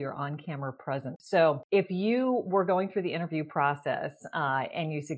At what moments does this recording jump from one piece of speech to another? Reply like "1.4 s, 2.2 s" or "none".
1.2 s